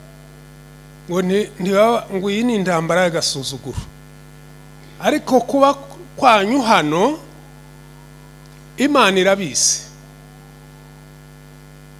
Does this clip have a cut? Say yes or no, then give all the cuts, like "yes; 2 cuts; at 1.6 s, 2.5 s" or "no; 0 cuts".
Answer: no; 0 cuts